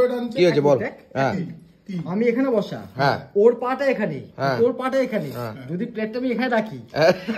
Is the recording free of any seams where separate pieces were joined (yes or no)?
yes